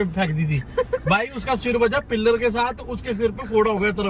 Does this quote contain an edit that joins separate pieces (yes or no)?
no